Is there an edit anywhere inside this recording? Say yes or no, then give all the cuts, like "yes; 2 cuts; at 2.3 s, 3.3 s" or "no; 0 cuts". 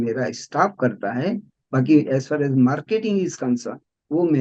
no; 0 cuts